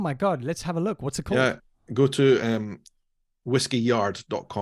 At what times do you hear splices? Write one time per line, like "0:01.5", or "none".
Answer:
none